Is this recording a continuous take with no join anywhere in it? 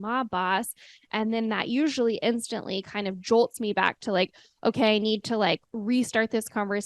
no; 1 cut; at 5.7 s

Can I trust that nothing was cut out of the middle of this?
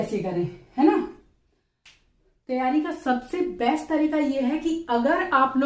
yes; 0 cuts

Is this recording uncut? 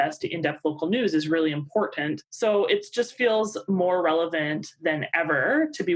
no; 1 cut; at 2.2 s

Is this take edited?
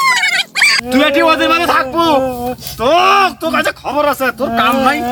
no; 0 cuts

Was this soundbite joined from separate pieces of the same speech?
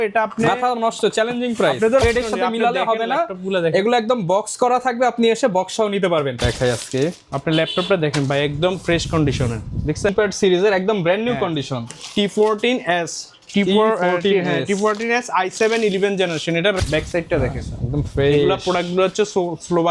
yes; 4 cuts; at 2.0 s, 6.4 s, 10.1 s, 16.8 s

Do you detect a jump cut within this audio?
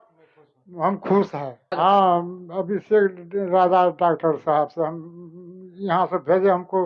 yes; 1 cut; at 1.7 s

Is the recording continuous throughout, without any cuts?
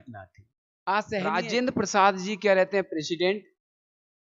no; 1 cut; at 1.3 s

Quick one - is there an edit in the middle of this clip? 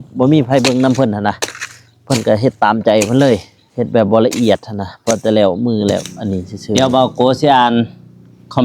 yes; 2 cuts; at 3.6 s, 6.8 s

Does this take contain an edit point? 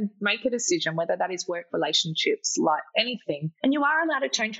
yes; 1 cut; at 3.5 s

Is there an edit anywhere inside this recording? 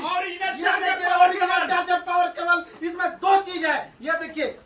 no; 0 cuts

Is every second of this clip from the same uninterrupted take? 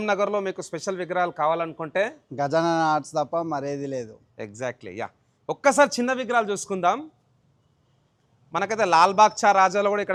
yes; 0 cuts

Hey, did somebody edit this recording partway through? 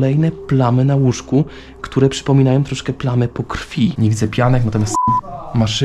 yes; 1 cut; at 3.9 s

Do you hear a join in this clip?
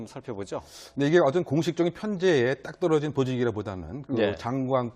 no; 0 cuts

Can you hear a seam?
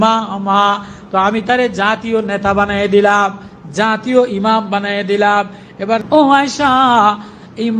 yes; 1 cut; at 6.0 s

